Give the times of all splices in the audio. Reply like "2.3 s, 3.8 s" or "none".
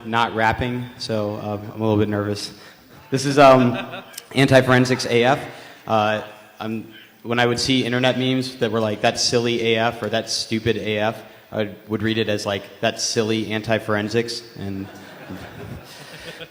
none